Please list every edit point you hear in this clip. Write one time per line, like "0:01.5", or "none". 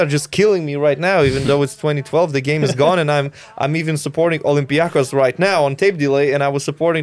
none